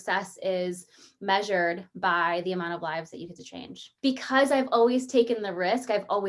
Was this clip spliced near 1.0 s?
no; 1 cut; at 3.8 s

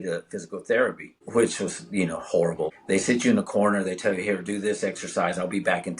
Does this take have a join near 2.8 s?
yes; 2 cuts; at 1.1 s, 2.8 s

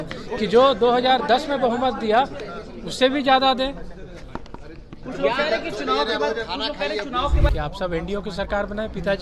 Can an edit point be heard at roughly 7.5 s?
yes; 1 cut; at 7.5 s

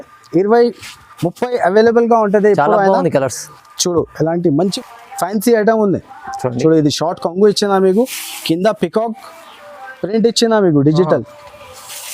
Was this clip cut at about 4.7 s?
yes; 1 cut; at 4.7 s

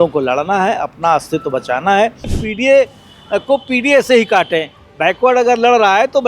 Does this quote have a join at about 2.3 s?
yes; 1 cut; at 2.3 s

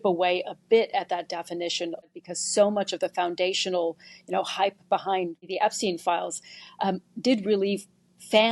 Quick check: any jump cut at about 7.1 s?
no; 2 cuts; at 2.1 s, 5.5 s

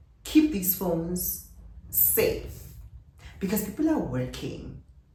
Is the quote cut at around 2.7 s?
no; 0 cuts

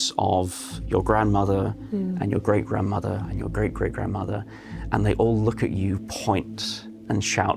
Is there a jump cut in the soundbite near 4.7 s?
no; 0 cuts

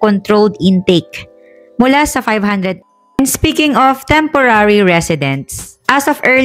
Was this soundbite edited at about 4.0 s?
no; 1 cut; at 2.7 s

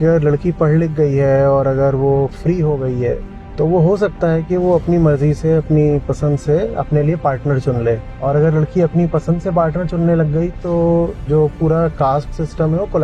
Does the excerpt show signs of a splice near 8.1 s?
yes; 2 cuts; at 3.4 s, 8.1 s

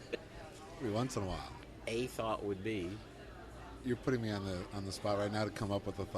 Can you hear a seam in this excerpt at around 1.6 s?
yes; 1 cut; at 1.6 s

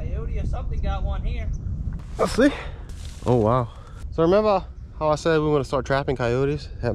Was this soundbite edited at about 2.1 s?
yes; 1 cut; at 2.1 s

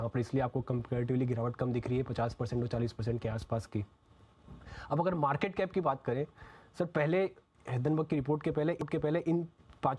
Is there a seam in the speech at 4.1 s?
no; 1 cut; at 8.9 s

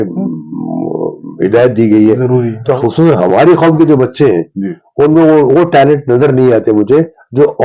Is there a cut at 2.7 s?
yes; 1 cut; at 2.7 s

